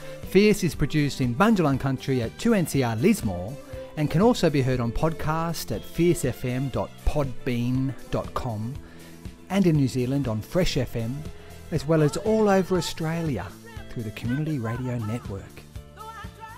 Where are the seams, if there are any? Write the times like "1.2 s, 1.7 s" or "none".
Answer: 15.4 s